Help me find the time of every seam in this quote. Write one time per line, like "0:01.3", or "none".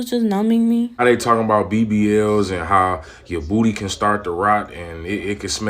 0:01.0